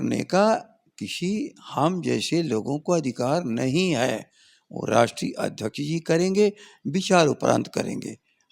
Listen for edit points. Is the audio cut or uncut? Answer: uncut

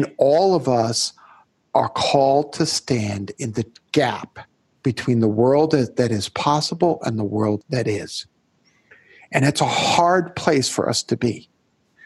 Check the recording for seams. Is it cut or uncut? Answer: cut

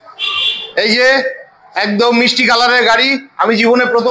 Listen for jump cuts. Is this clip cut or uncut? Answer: uncut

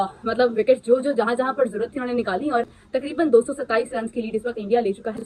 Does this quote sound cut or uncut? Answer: uncut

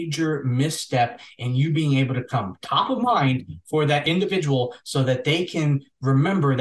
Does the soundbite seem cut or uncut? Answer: cut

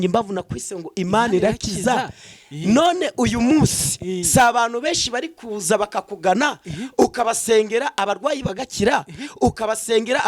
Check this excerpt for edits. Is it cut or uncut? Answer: uncut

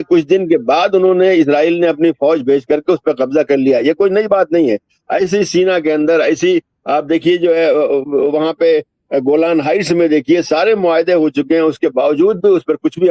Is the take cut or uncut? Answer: uncut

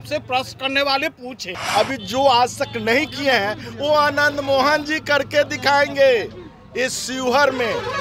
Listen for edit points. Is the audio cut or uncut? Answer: cut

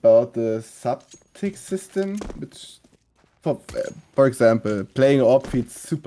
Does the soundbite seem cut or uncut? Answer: uncut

